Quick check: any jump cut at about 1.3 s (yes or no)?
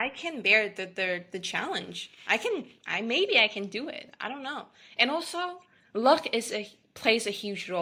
no